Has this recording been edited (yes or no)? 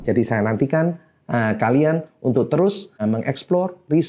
yes